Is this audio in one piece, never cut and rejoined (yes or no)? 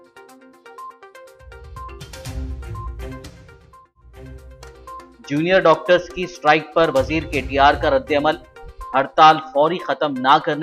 yes